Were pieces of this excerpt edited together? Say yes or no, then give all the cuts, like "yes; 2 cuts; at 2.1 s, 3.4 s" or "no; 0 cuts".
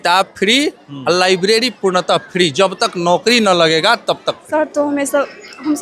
yes; 1 cut; at 4.4 s